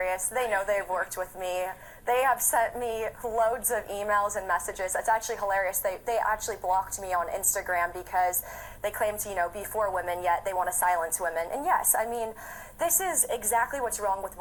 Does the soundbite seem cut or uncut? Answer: cut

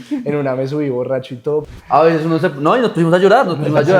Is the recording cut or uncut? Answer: cut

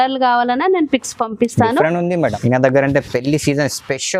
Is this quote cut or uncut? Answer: cut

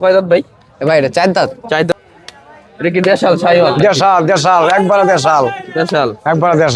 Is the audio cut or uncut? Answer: cut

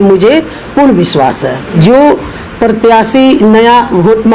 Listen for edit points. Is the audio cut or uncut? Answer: cut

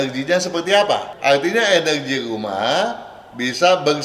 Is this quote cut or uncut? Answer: cut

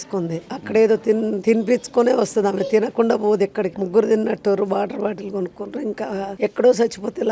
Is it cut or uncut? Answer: cut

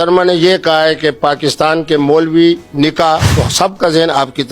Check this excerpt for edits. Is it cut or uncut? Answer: cut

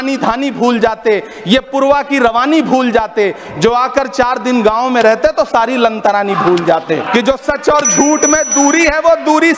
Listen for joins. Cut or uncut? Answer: cut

